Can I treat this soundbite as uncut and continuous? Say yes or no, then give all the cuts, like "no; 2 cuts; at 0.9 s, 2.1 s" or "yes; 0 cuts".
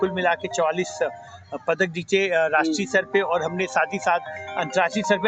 yes; 0 cuts